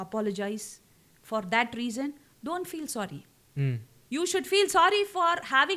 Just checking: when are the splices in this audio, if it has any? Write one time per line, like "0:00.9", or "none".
none